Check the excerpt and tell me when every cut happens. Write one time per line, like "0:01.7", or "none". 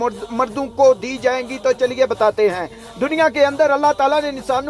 none